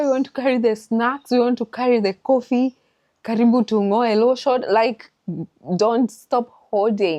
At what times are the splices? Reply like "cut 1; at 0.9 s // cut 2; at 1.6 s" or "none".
none